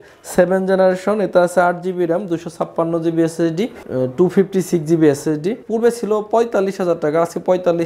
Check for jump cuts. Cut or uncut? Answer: cut